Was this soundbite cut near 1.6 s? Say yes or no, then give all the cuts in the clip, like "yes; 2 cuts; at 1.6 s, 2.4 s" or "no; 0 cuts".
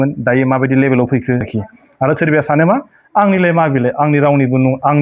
yes; 1 cut; at 1.6 s